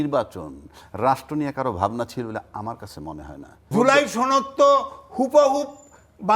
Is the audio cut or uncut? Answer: cut